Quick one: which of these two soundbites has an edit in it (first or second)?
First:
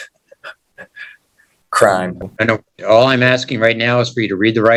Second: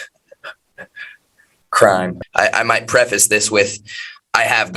second